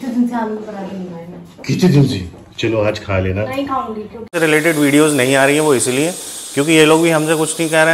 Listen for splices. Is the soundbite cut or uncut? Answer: cut